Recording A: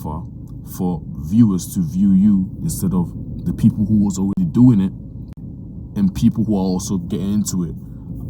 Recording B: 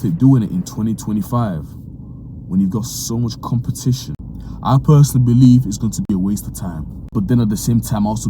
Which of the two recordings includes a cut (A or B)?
B